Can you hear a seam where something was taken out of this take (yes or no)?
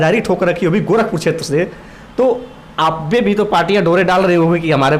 no